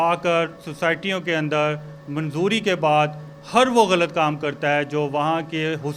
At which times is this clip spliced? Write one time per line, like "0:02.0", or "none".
none